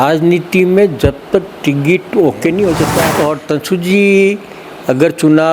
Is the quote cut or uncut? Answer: cut